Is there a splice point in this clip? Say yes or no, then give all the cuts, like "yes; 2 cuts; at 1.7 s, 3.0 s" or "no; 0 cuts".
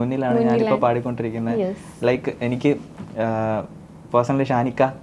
no; 0 cuts